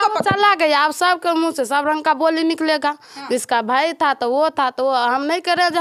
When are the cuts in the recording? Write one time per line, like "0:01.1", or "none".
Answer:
none